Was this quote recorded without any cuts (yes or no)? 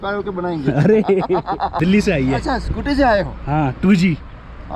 no